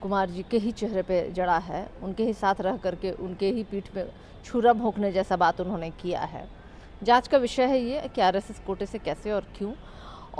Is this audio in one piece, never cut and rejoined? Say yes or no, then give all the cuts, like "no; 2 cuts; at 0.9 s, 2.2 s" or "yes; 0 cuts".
yes; 0 cuts